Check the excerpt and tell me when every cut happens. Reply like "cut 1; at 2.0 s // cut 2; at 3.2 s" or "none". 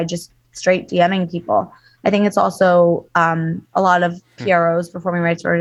none

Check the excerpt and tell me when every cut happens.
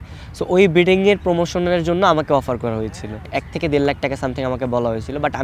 cut 1; at 3.2 s

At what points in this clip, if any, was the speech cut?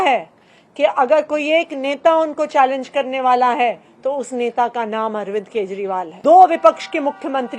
cut 1; at 6.1 s

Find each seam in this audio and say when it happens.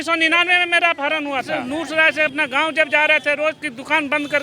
cut 1; at 1.6 s

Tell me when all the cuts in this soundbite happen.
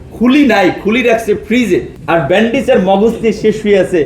cut 1; at 1.9 s

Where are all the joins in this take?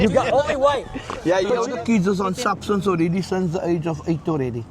cut 1; at 1.6 s

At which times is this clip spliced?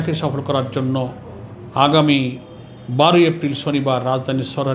none

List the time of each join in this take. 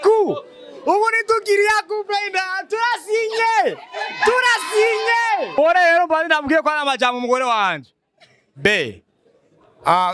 cut 1; at 5.6 s

